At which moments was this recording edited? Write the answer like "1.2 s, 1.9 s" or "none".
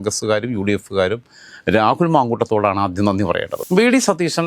3.6 s